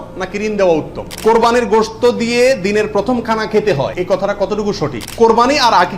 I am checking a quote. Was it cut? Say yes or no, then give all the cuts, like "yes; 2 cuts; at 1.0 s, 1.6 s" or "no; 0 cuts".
yes; 3 cuts; at 1.1 s, 3.9 s, 5.0 s